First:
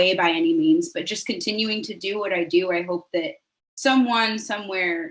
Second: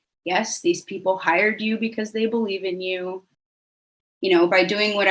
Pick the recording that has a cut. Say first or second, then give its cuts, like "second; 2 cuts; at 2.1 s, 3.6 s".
second; 1 cut; at 3.6 s